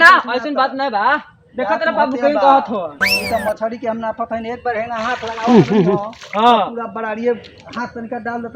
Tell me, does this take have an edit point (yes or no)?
no